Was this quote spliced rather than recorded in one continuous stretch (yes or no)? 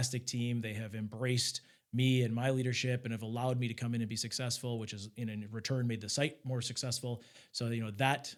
no